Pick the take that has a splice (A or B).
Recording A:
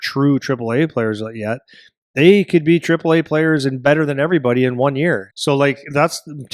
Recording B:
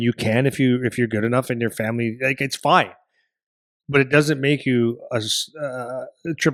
A